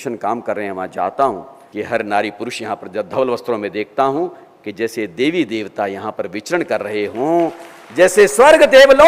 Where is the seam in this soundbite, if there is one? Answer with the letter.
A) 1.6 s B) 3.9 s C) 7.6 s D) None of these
A